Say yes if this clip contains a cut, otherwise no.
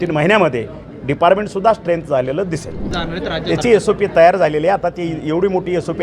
yes